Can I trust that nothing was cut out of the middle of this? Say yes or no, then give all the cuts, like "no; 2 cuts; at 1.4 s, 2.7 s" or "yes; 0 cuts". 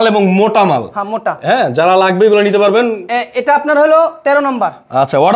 yes; 0 cuts